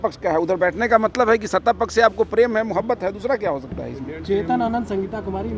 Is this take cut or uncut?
uncut